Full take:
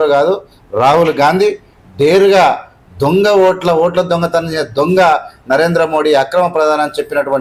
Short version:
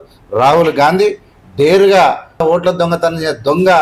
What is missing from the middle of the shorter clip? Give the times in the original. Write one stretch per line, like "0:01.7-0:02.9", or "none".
0:02.8-0:03.7